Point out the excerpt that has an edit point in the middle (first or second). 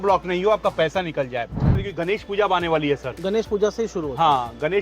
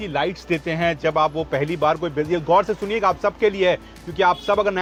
first